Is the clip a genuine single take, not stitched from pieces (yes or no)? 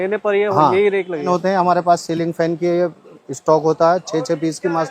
no